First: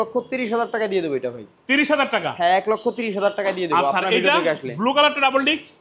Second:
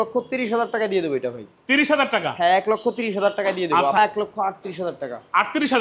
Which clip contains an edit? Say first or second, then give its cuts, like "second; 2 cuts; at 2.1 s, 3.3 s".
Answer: second; 1 cut; at 4.0 s